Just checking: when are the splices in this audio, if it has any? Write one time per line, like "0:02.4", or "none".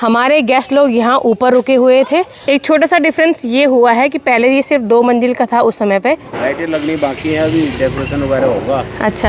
0:02.5
0:06.3